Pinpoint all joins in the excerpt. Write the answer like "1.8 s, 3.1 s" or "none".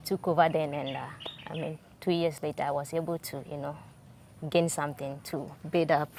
none